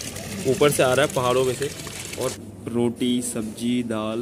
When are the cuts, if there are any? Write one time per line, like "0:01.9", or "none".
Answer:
0:02.4